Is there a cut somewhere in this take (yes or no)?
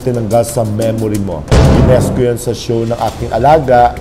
yes